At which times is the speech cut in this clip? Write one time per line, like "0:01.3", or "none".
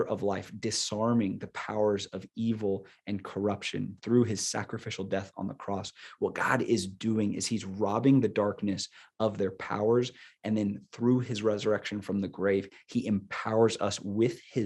none

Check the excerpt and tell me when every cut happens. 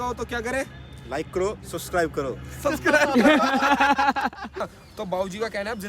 0:04.6

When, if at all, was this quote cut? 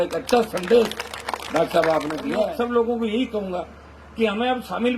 0:02.5

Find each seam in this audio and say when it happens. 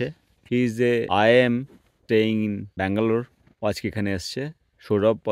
0:01.9

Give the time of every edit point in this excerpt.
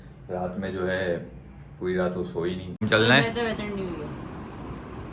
0:02.8

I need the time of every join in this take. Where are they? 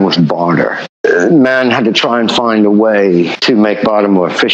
0:01.0
0:03.4

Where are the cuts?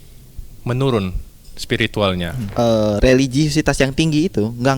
0:02.4

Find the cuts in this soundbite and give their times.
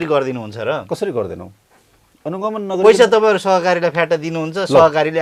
none

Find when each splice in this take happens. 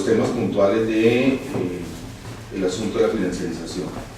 0:02.4

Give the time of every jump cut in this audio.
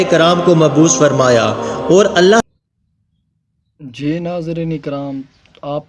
0:02.4

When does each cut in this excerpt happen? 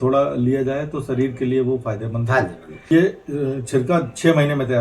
0:02.8

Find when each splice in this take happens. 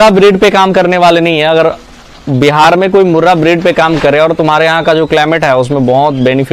none

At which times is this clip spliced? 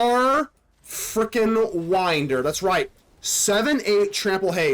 none

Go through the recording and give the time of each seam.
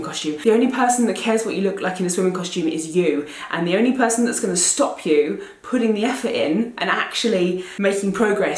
0:07.7

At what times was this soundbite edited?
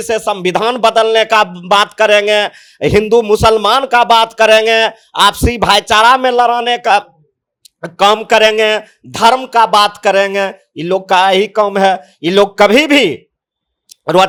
none

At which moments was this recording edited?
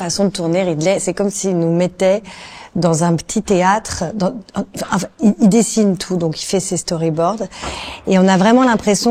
none

